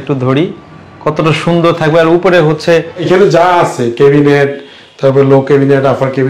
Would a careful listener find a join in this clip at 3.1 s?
yes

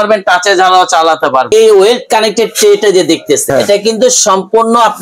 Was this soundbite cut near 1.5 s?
yes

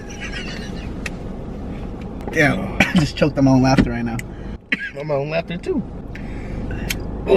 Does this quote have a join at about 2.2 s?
yes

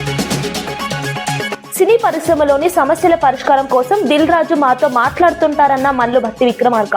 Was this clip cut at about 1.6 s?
yes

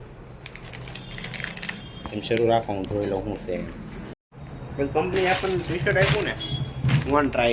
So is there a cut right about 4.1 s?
yes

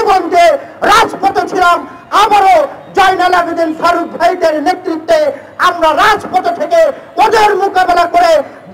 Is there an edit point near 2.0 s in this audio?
no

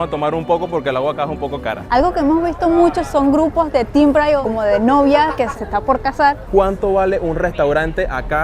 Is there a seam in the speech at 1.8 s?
yes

